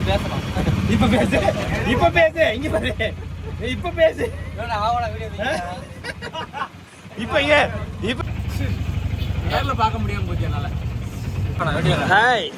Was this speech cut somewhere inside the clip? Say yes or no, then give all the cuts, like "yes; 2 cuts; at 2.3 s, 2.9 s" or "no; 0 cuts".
yes; 2 cuts; at 8.2 s, 11.6 s